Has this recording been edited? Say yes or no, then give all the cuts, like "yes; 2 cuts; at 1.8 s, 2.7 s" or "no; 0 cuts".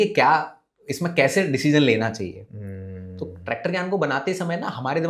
no; 0 cuts